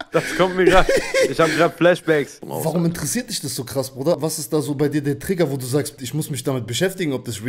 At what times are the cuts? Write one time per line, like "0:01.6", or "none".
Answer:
0:02.4
0:04.2
0:05.9